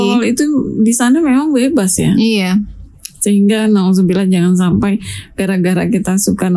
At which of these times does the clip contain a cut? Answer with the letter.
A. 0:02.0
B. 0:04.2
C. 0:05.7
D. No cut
D